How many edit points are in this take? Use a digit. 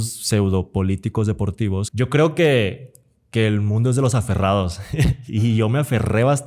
1